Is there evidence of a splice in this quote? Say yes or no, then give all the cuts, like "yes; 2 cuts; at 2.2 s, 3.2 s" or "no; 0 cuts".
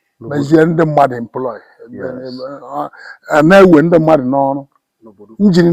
no; 0 cuts